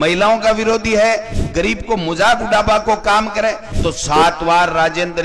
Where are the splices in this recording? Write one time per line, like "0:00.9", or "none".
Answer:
0:03.7